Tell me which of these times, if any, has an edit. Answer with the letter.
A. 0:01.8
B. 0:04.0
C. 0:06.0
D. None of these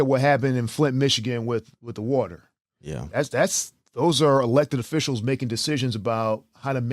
D